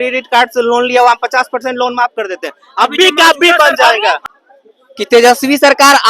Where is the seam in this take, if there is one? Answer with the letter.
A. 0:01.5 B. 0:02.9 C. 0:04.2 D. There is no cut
C